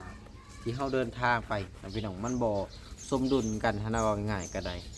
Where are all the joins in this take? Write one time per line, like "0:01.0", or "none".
none

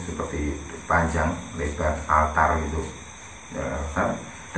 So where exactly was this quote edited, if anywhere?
none

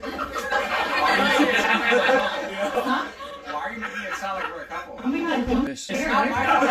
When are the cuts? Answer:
0:05.8

